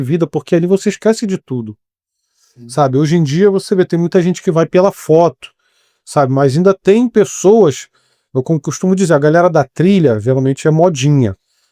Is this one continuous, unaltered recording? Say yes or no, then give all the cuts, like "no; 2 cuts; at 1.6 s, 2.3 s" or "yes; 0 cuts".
yes; 0 cuts